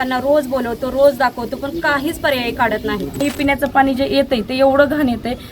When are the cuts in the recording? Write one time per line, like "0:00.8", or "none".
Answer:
0:03.2